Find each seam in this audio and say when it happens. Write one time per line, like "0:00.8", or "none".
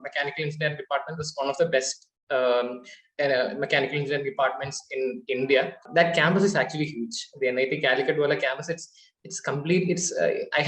0:05.8